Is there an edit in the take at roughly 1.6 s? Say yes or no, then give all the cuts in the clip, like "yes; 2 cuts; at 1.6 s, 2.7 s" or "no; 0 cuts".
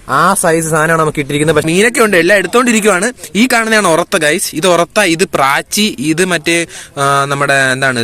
yes; 1 cut; at 1.6 s